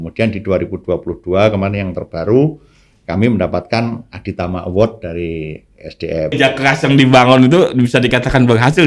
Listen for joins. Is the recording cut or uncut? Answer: cut